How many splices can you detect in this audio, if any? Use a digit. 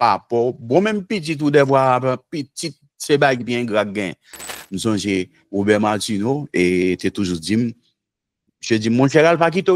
1